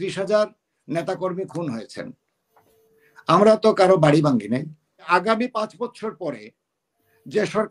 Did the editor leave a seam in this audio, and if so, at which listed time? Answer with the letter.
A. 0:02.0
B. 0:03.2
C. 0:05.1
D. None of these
C